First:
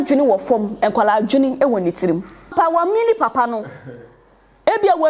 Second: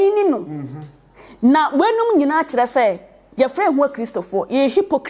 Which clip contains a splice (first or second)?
first